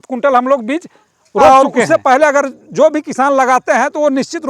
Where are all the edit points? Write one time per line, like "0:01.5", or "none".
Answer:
0:01.5